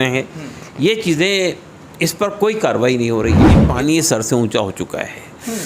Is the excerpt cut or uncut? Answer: cut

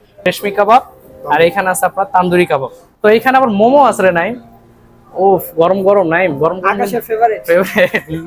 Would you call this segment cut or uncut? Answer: uncut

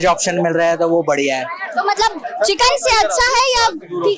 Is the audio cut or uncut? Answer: uncut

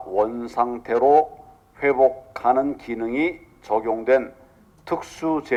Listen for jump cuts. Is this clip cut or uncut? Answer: uncut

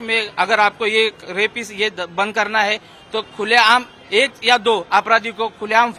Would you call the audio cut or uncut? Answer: uncut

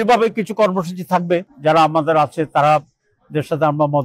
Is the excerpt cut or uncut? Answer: cut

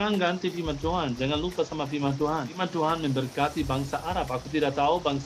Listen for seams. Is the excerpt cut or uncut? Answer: cut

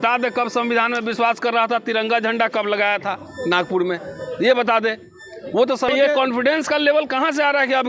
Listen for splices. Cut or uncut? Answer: cut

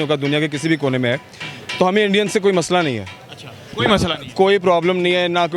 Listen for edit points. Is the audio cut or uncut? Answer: uncut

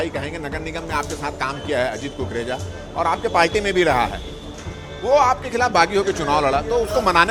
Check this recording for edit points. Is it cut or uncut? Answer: uncut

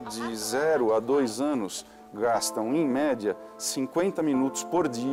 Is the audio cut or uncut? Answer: uncut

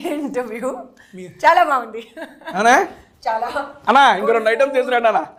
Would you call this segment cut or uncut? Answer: uncut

